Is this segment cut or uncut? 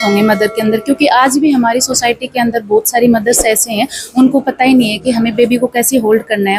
uncut